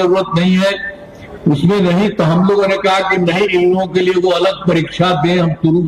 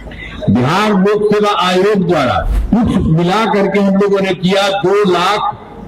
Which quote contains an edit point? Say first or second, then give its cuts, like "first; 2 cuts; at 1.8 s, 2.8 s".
second; 1 cut; at 2.5 s